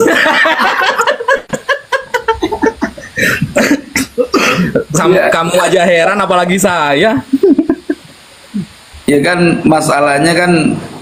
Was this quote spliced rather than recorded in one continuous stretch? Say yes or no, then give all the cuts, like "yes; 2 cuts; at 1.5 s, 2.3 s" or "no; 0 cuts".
no; 0 cuts